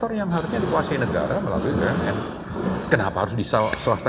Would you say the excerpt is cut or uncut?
uncut